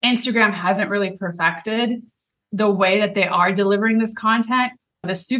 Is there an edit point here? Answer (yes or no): no